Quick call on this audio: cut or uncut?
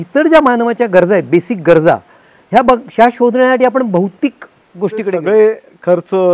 cut